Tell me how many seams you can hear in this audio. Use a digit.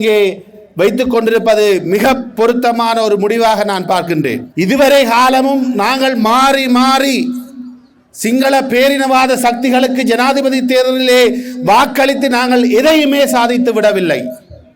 1